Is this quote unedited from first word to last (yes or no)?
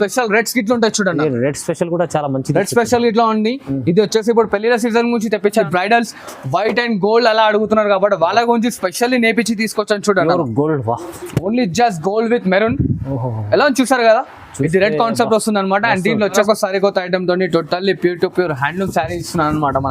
no